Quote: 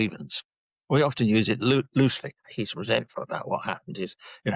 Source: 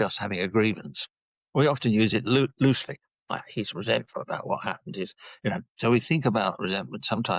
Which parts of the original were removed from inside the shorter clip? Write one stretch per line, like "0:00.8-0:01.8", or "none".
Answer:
0:03.1-0:03.5